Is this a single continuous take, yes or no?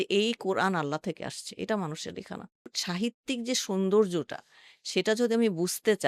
no